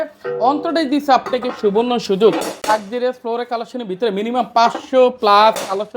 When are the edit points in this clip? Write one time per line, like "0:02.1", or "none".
0:02.6